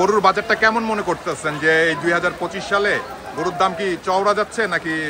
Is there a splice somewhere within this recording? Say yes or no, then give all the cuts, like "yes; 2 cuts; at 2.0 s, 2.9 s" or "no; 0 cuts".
no; 0 cuts